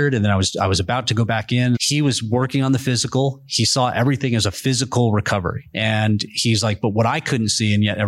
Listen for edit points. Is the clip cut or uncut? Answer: cut